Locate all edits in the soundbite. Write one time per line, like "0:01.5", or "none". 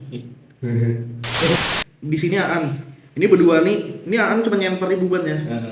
0:01.6